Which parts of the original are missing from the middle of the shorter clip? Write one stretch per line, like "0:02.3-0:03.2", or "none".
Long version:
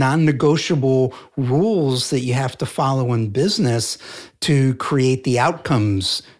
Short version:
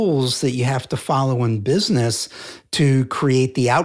none